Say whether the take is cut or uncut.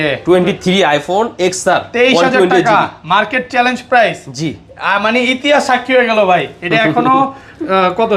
uncut